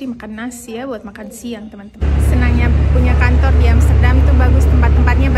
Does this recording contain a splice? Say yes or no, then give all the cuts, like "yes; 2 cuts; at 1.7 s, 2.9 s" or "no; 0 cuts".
no; 0 cuts